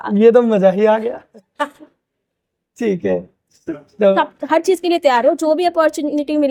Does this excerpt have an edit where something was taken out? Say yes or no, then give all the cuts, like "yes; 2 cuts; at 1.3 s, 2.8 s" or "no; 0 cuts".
no; 0 cuts